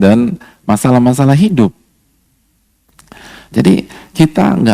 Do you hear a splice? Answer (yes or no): no